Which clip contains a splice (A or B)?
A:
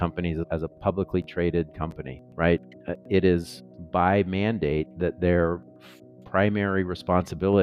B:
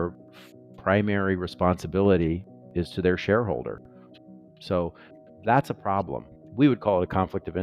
B